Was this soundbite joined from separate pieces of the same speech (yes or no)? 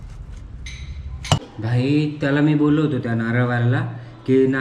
yes